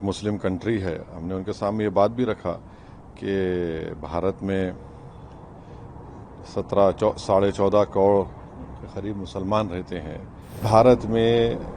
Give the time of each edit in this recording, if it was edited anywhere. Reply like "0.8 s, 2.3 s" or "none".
10.6 s